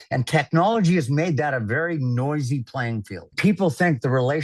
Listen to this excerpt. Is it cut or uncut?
cut